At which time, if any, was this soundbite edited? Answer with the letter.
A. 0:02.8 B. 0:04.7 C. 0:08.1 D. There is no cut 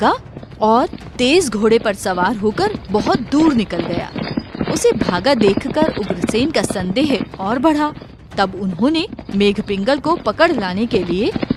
D